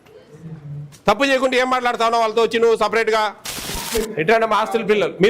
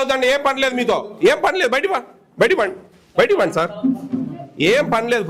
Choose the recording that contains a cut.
first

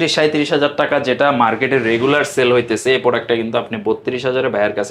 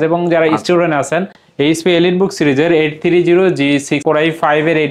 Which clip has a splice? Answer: second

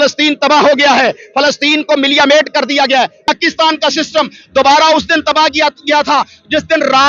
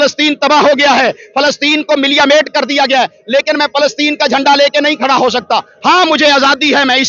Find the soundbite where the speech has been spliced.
first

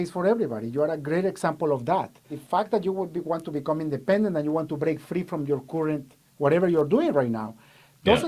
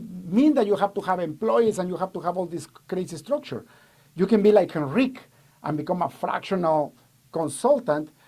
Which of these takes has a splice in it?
first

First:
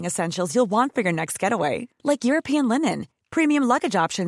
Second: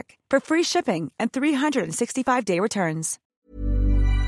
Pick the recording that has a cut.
second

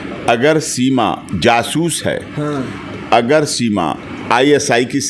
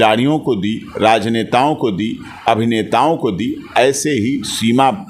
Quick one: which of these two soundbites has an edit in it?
first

